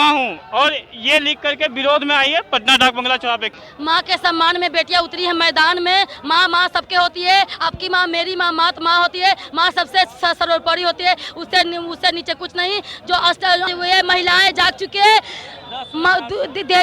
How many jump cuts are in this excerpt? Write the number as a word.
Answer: two